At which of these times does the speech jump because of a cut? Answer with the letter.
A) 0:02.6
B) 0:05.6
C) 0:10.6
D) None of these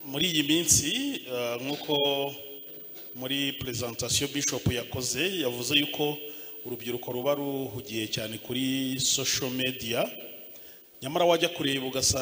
D